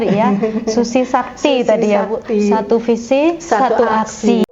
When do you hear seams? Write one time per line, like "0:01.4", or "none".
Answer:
none

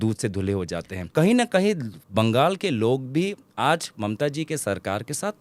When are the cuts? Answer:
0:01.1

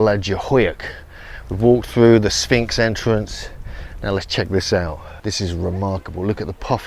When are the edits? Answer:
0:05.1

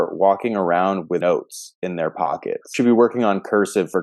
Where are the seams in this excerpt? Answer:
0:01.2
0:02.7

